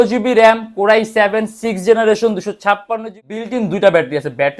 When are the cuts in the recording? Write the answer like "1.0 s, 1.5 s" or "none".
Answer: 3.2 s